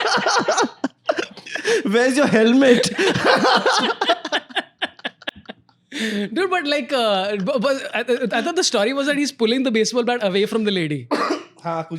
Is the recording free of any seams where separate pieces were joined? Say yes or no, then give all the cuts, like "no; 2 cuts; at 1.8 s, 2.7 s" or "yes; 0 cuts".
yes; 0 cuts